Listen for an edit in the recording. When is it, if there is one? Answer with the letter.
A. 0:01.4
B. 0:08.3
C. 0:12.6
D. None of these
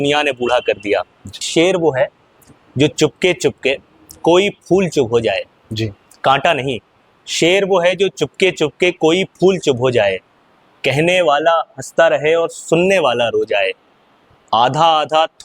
A